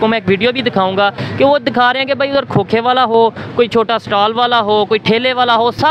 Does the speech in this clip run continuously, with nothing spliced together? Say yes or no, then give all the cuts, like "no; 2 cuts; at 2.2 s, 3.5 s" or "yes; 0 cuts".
yes; 0 cuts